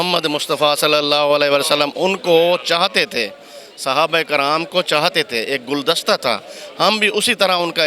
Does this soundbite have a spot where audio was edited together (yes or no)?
no